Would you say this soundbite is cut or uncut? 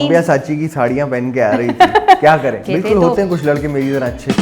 cut